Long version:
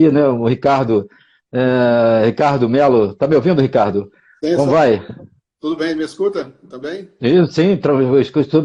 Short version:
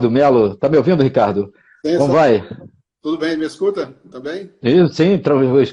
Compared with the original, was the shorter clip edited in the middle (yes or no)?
no